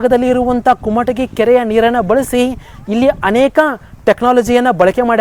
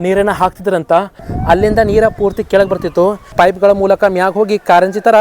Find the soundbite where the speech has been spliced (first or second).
second